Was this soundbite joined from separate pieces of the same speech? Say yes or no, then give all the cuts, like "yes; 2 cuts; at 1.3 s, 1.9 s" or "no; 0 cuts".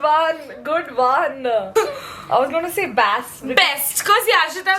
yes; 1 cut; at 1.7 s